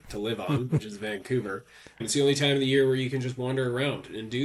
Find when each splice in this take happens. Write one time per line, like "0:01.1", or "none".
0:02.0